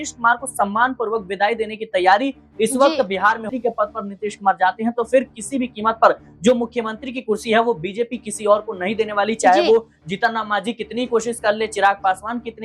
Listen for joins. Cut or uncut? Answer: cut